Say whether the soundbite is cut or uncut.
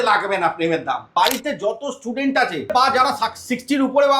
cut